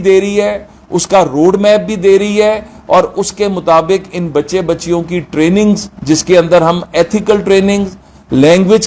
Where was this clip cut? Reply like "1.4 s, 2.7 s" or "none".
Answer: none